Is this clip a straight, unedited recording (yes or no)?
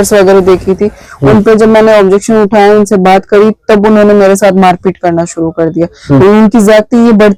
yes